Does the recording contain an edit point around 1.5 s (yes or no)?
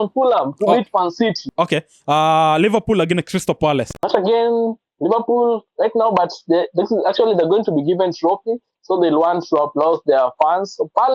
yes